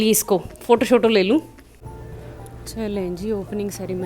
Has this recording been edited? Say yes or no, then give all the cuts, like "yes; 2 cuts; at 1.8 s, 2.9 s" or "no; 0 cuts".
yes; 1 cut; at 1.7 s